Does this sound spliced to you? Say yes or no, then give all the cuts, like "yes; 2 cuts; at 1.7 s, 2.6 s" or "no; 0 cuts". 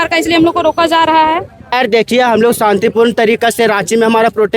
yes; 1 cut; at 1.6 s